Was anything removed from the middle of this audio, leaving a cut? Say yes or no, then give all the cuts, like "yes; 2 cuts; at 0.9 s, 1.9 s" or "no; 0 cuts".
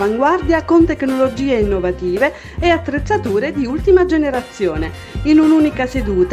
no; 0 cuts